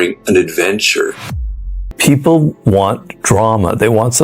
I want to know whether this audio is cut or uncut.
cut